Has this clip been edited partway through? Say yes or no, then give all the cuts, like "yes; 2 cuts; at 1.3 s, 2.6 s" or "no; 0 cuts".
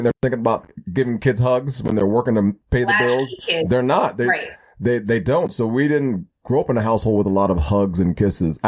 no; 0 cuts